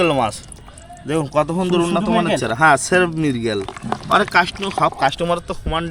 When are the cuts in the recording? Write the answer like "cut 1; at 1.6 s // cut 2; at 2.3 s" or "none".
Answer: none